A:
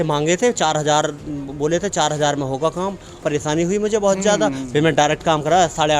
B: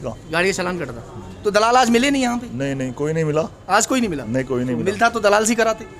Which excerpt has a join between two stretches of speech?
A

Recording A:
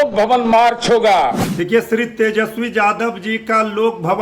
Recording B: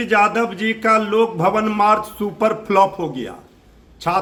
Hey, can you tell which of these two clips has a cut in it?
A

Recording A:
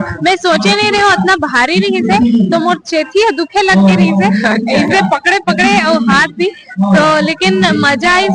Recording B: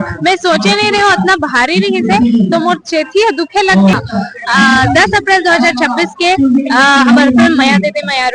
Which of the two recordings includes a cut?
B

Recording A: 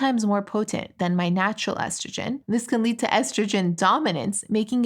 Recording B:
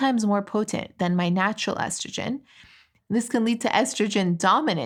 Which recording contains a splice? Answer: A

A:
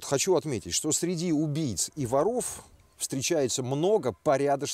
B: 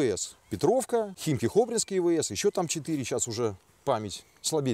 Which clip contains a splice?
B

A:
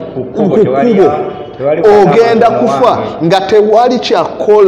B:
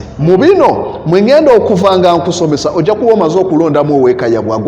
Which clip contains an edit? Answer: B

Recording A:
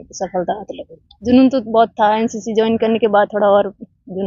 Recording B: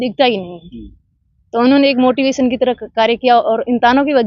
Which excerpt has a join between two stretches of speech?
A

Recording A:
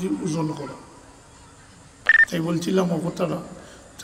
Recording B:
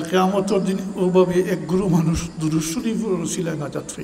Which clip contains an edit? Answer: A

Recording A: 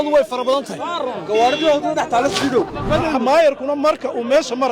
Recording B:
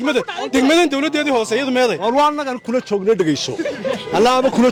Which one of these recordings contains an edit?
A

